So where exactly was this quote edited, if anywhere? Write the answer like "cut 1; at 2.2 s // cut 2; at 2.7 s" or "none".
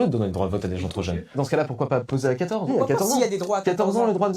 cut 1; at 1.3 s // cut 2; at 2.7 s